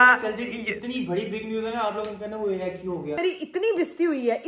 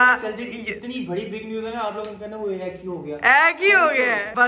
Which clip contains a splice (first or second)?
first